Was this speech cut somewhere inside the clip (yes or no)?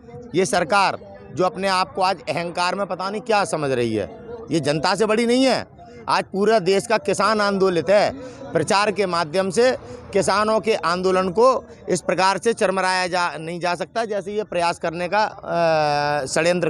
no